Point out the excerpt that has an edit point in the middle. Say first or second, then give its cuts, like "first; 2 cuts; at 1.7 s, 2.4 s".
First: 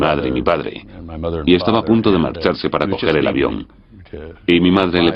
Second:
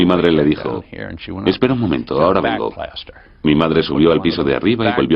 second; 1 cut; at 1.2 s